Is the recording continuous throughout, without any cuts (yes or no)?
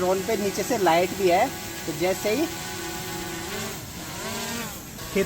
yes